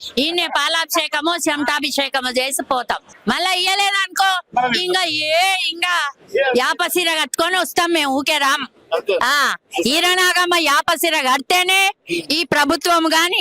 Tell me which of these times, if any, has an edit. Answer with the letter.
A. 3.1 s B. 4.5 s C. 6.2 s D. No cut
A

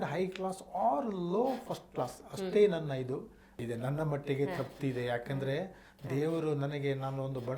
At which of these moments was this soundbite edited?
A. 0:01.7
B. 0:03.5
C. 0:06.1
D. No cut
B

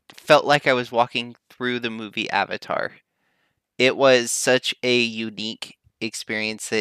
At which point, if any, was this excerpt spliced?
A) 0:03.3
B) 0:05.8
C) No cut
C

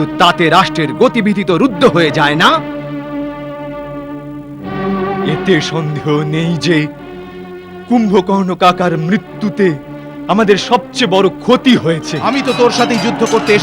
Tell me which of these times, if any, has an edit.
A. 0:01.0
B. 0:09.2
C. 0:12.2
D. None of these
C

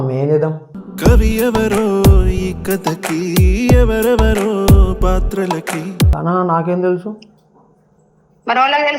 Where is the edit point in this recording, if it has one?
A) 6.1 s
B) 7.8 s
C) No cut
A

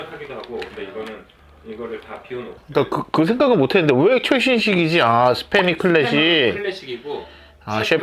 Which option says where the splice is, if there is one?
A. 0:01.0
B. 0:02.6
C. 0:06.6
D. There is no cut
B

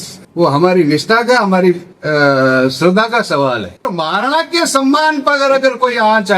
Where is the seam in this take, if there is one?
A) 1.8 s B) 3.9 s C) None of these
B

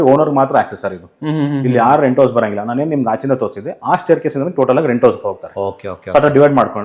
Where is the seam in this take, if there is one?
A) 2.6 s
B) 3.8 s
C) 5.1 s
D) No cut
D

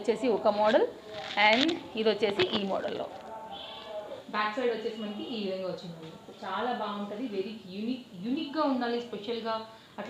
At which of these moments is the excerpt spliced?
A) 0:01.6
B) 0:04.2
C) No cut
B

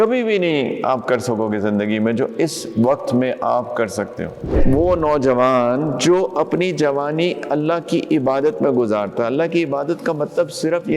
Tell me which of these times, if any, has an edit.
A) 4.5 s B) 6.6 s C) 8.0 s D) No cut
A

